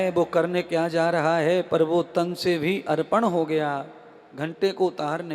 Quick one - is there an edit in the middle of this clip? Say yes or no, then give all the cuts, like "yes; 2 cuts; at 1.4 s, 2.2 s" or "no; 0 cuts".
no; 0 cuts